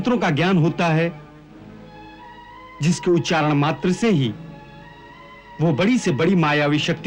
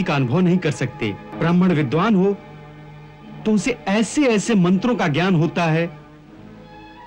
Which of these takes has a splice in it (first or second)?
second